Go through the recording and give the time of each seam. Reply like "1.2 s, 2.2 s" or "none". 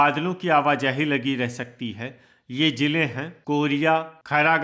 3.3 s